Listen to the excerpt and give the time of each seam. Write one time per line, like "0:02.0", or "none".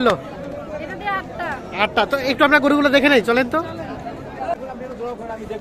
0:04.5